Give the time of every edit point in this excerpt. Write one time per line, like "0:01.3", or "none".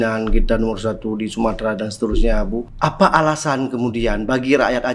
0:02.7